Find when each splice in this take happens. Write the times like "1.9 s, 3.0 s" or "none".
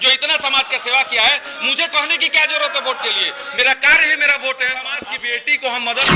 4.9 s